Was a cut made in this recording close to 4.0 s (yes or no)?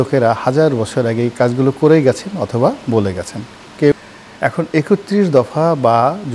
yes